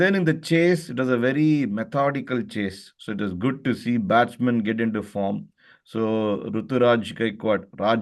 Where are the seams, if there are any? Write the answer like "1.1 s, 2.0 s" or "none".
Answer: none